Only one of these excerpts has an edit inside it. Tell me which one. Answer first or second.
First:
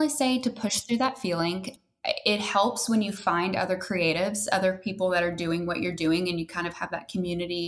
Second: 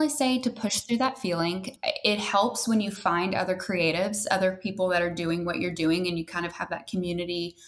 second